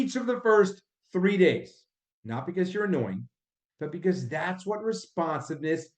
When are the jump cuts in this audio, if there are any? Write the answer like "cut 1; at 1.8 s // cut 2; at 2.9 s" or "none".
cut 1; at 1.9 s